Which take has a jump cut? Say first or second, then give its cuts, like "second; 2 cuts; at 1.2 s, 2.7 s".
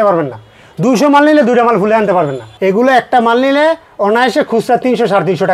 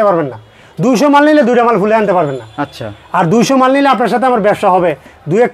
first; 1 cut; at 2.4 s